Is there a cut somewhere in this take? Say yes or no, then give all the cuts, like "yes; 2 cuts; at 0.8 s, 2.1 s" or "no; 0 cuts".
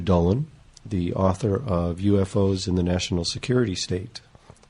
yes; 1 cut; at 1.6 s